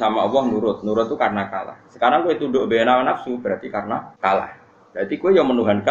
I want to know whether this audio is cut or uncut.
cut